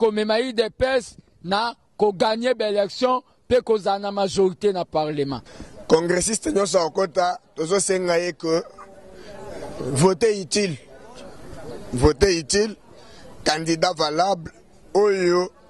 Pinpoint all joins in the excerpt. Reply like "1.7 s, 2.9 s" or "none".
5.4 s